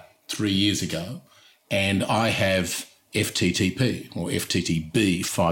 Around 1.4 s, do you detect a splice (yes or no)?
no